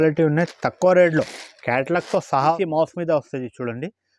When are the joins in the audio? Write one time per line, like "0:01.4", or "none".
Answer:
0:02.5